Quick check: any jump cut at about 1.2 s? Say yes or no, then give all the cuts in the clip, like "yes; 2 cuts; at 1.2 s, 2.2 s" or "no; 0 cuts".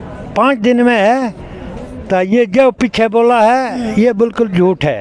no; 0 cuts